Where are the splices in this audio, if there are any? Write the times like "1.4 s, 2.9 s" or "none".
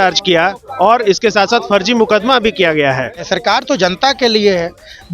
3.3 s